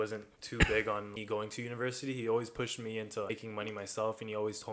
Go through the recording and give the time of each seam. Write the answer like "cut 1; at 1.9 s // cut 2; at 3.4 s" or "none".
cut 1; at 1.1 s // cut 2; at 3.3 s